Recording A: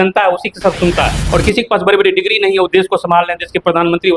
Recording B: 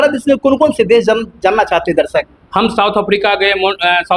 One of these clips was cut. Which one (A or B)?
A